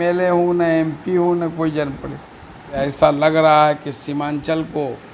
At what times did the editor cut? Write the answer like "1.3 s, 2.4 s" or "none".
2.7 s